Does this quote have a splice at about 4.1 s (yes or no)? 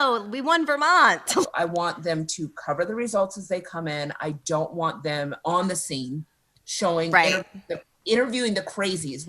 no